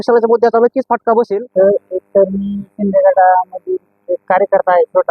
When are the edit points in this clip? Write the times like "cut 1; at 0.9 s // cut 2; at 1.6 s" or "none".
cut 1; at 1.4 s